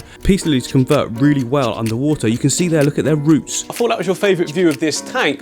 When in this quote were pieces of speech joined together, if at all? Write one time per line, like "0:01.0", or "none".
0:03.7